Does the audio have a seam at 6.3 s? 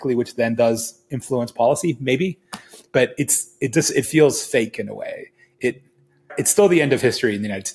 yes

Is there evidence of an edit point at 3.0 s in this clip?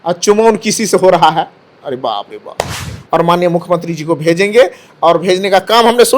yes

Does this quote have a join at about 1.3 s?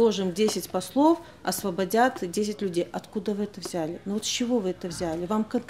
no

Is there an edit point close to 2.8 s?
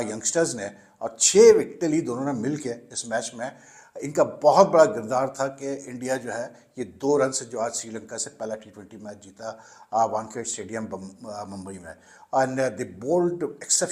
no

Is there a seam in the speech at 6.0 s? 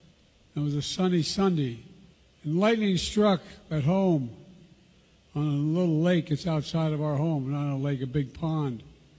no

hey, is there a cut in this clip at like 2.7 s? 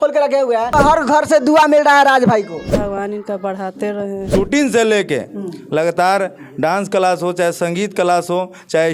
yes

